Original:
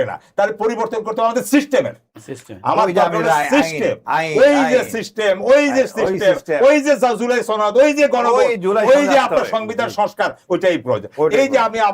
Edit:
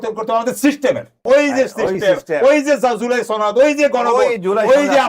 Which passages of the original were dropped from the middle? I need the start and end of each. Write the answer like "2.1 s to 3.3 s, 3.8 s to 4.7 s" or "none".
2.1 s to 5.4 s